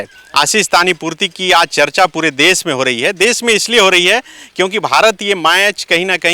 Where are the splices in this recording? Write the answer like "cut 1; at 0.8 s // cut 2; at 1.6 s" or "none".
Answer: none